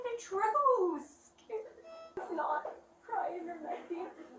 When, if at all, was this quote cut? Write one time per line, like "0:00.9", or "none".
0:02.1